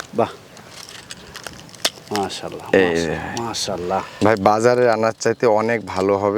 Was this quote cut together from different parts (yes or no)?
yes